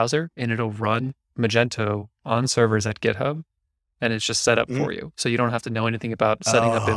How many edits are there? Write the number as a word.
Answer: one